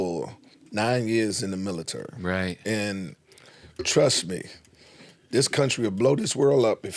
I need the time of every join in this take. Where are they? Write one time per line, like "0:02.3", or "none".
none